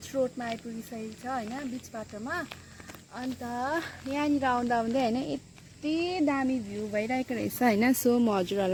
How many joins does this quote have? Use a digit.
0